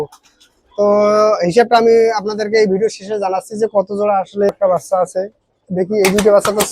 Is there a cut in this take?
yes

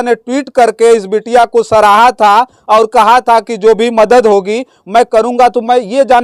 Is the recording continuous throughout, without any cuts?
yes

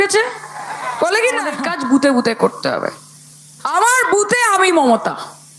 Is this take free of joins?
no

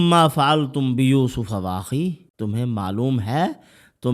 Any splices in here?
yes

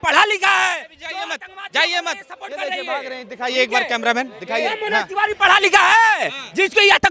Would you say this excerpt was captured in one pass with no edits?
yes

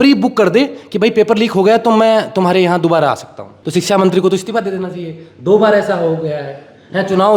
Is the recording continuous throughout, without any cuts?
no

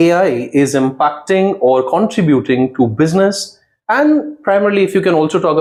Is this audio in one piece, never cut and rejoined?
yes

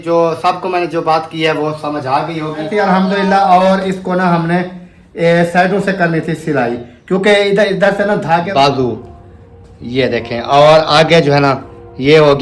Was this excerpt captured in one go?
no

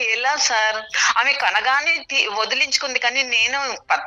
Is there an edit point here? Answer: yes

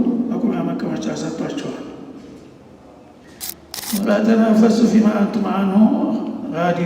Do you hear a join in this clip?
yes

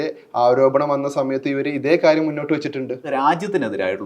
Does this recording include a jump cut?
yes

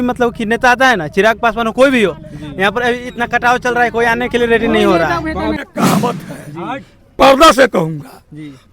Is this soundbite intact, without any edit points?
no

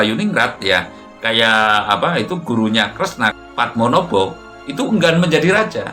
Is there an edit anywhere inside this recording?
yes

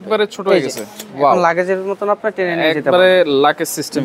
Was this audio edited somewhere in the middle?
no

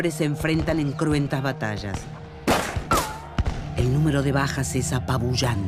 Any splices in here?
no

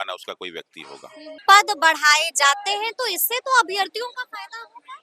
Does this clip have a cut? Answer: yes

